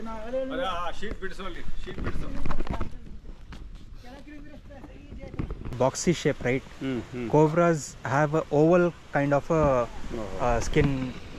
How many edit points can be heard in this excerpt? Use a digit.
1